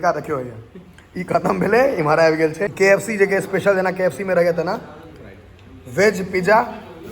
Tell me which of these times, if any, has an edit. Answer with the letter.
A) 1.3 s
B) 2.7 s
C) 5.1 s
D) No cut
B